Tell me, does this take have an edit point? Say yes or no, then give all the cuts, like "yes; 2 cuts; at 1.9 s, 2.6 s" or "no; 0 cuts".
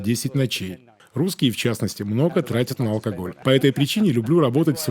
yes; 2 cuts; at 0.9 s, 3.3 s